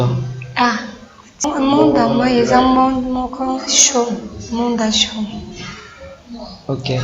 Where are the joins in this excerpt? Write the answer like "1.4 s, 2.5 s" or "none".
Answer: 1.5 s